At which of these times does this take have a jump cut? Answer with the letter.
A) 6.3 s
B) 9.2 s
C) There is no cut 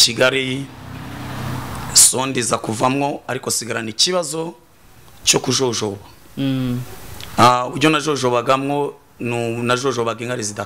C